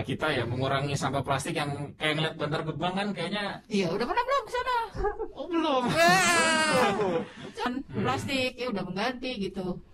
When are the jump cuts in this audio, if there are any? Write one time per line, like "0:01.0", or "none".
0:07.7